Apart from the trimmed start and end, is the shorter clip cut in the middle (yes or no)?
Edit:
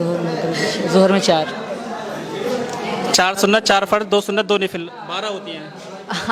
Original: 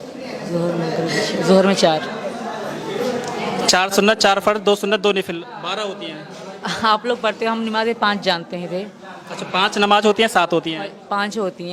no